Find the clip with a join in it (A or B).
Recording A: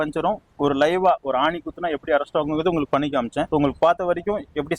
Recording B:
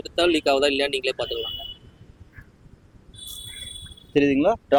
A